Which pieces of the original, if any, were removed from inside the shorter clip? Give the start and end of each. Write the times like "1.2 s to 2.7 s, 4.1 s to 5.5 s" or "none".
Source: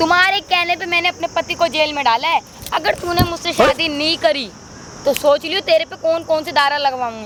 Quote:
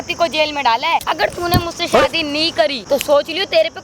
2.5 s to 2.7 s, 4.4 s to 4.9 s